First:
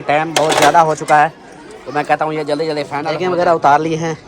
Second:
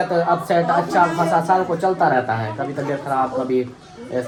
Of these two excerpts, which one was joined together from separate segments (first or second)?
first